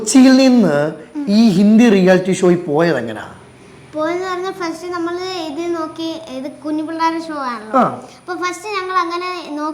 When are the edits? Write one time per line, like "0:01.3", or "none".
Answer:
none